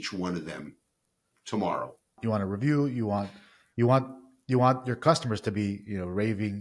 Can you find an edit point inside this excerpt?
yes; 1 cut; at 2.1 s

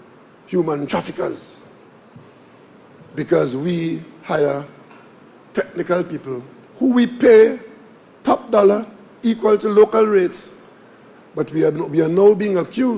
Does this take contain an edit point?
no; 0 cuts

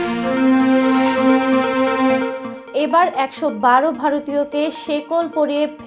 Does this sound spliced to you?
no; 0 cuts

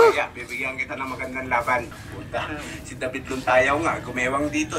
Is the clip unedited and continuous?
no; 1 cut; at 2.0 s

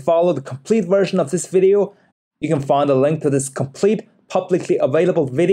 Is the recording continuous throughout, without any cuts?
no; 1 cut; at 2.0 s

